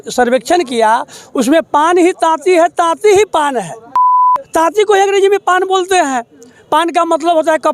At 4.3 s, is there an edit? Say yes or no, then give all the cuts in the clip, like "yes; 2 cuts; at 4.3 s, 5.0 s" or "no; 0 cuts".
yes; 1 cut; at 4.3 s